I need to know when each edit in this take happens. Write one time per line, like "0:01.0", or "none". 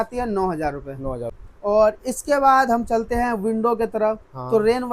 0:01.4